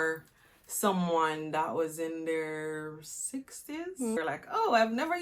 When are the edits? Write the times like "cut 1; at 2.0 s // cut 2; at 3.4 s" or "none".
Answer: cut 1; at 4.2 s